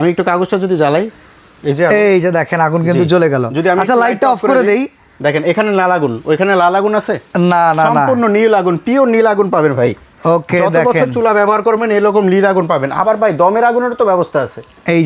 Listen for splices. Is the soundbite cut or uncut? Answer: uncut